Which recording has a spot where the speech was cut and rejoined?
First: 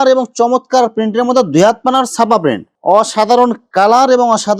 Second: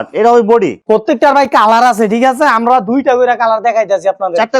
first; 1 cut; at 2.7 s

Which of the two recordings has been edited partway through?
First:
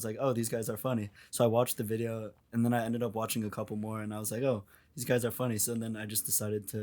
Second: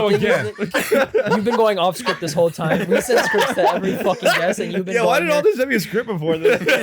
first; 1 cut; at 1.2 s

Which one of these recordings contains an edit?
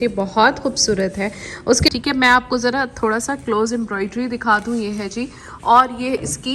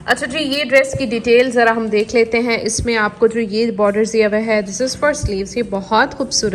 first; 1 cut; at 1.9 s

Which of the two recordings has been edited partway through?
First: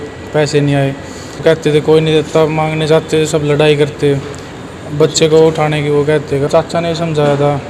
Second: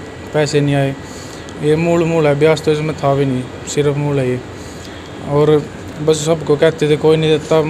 first; 2 cuts; at 1.4 s, 6.5 s

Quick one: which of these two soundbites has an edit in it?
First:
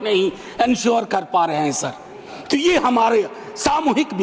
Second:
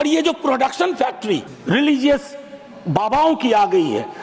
second; 1 cut; at 1.5 s

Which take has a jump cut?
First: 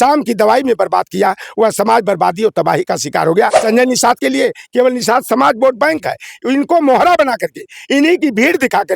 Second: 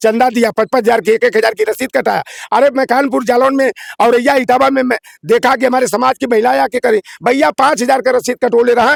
first; 1 cut; at 3.6 s

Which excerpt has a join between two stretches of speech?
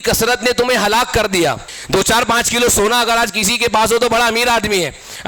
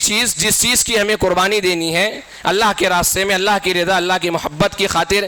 first; 1 cut; at 1.7 s

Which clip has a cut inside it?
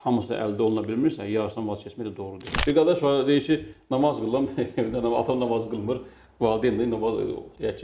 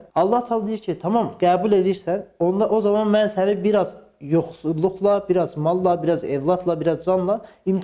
first; 1 cut; at 2.5 s

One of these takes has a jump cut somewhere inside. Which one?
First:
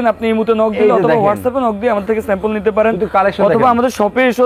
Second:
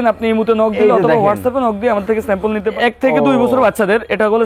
second; 1 cut; at 2.7 s

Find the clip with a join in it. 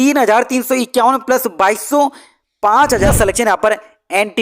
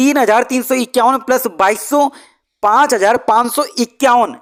first; 1 cut; at 3.1 s

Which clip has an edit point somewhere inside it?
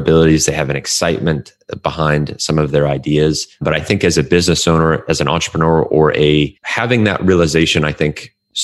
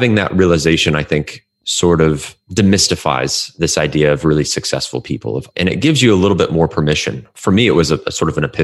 second; 2 cuts; at 5.4 s, 7.2 s

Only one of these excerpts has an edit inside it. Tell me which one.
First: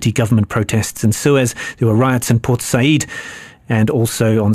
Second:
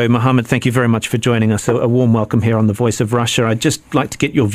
second; 1 cut; at 1.6 s

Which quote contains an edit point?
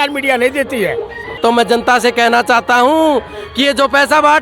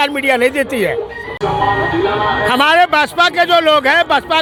first; 1 cut; at 1.4 s

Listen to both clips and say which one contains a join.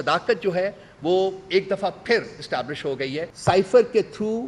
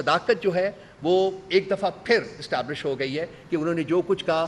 first; 1 cut; at 3.3 s

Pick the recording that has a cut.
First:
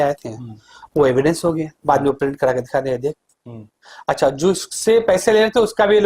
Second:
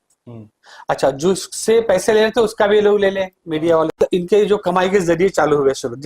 second; 1 cut; at 4.0 s

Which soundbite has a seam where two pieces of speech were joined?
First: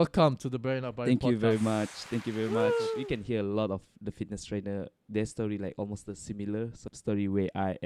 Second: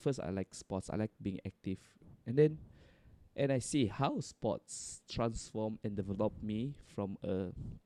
first; 2 cuts; at 3.0 s, 6.9 s

